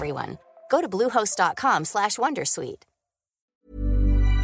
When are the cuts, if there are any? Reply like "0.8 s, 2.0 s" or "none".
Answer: 3.5 s